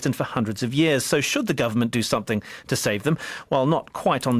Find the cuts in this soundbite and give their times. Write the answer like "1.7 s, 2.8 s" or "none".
none